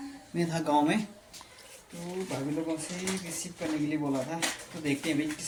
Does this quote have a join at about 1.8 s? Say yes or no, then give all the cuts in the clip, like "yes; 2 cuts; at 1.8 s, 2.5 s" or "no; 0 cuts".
no; 0 cuts